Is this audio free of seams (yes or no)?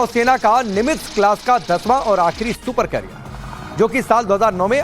no